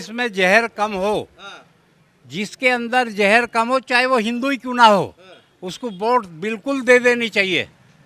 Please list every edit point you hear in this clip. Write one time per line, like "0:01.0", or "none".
none